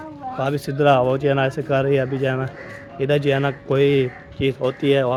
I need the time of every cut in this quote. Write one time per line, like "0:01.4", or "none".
none